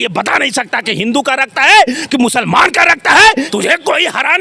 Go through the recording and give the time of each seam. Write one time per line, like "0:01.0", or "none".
0:03.5